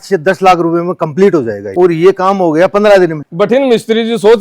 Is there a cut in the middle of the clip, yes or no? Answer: yes